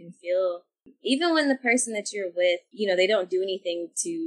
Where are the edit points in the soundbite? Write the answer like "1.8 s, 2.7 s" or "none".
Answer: 2.7 s